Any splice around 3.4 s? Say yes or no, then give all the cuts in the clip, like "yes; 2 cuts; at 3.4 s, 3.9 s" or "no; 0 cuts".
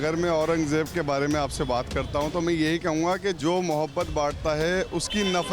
yes; 1 cut; at 3.4 s